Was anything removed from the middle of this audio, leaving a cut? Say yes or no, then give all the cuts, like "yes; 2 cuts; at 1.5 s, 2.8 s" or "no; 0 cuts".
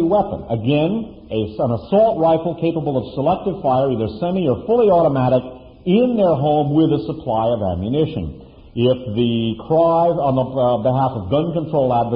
no; 0 cuts